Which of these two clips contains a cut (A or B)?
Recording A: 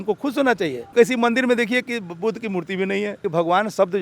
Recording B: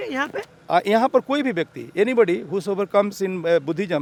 A